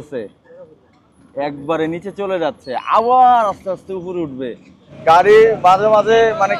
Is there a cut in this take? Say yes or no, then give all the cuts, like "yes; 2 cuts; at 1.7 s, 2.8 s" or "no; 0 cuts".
yes; 1 cut; at 4.9 s